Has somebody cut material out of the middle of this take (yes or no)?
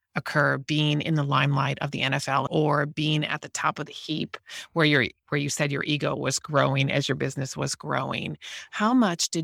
yes